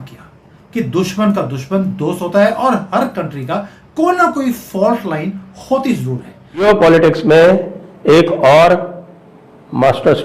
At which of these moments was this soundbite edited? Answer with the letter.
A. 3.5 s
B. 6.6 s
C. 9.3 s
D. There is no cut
B